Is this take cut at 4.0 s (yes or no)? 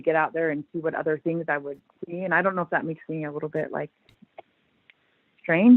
no